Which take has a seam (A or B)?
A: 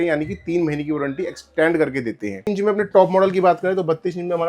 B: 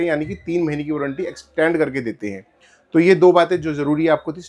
A